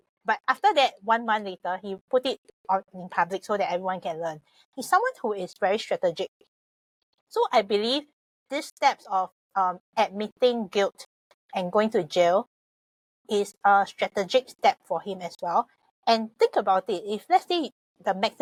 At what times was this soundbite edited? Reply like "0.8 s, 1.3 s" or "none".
none